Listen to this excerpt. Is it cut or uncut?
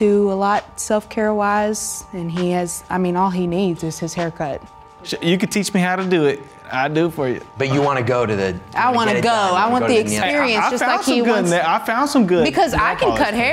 cut